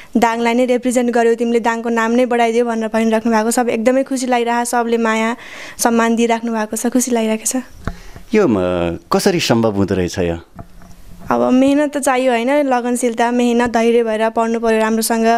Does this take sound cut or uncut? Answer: uncut